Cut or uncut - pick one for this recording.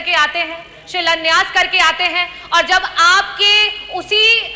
uncut